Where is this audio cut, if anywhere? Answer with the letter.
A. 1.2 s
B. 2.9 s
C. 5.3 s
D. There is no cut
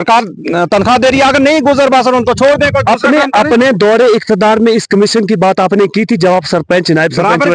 B